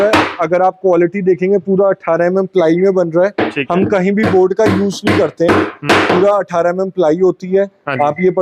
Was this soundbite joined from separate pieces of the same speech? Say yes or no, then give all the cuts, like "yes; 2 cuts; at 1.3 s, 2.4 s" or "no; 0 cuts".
no; 0 cuts